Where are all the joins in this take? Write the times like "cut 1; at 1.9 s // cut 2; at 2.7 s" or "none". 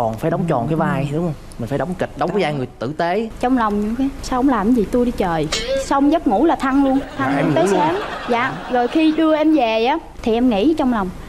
cut 1; at 3.3 s